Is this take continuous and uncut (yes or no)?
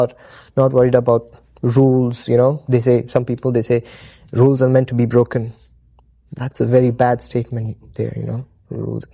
yes